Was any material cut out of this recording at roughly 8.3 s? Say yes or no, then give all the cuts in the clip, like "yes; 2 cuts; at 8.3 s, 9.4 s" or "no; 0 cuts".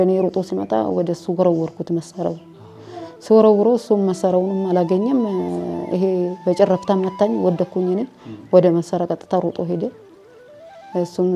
no; 0 cuts